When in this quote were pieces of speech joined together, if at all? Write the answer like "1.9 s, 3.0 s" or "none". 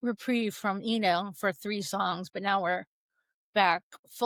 none